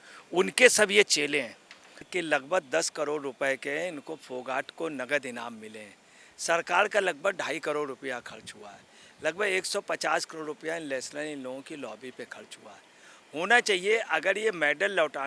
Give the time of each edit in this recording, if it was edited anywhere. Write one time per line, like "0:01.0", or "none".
0:02.0